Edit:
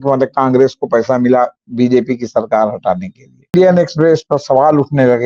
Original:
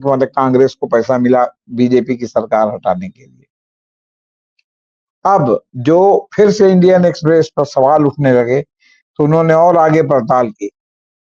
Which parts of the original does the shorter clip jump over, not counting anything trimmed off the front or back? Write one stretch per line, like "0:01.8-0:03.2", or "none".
0:03.5-0:06.8